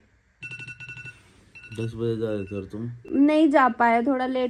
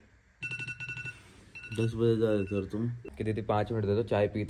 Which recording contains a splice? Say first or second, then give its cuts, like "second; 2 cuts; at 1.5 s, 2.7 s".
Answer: second; 1 cut; at 3.0 s